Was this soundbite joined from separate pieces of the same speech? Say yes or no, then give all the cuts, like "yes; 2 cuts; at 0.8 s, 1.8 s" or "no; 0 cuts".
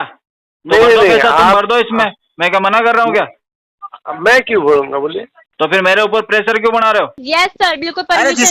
yes; 1 cut; at 7.2 s